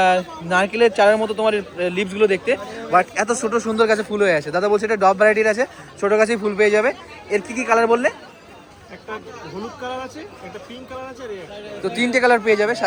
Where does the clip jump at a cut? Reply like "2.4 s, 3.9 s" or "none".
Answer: none